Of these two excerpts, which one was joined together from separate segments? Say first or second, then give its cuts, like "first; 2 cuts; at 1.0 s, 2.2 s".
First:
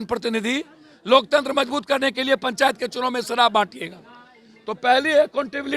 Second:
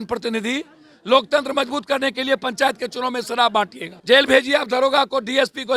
second; 1 cut; at 3.9 s